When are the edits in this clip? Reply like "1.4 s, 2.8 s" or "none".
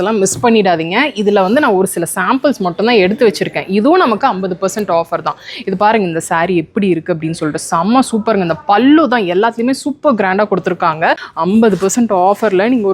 11.3 s